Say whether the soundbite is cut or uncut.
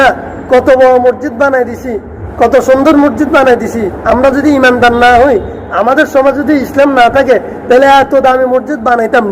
cut